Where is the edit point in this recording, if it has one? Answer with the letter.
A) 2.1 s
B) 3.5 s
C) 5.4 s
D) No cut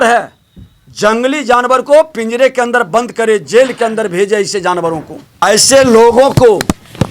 C